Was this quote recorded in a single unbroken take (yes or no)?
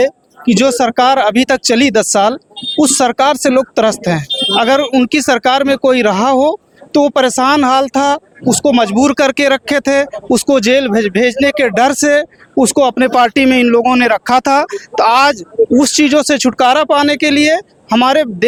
yes